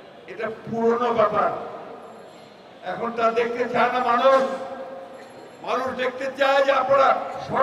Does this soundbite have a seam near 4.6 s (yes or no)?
no